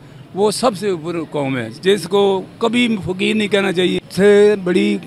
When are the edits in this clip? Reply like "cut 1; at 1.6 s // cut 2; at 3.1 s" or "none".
cut 1; at 4.0 s